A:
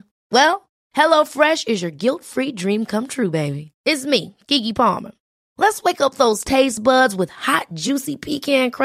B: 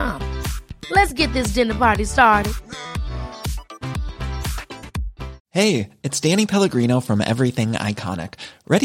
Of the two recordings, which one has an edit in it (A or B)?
B